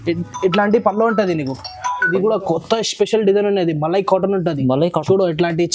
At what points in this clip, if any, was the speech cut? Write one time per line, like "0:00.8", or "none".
0:02.1